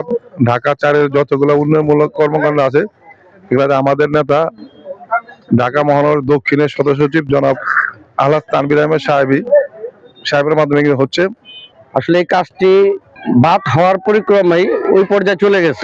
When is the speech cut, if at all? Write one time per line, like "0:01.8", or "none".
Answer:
0:11.8
0:13.1